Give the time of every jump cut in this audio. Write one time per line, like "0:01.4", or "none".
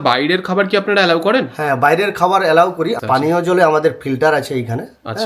0:02.9